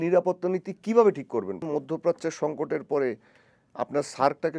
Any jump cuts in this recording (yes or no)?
yes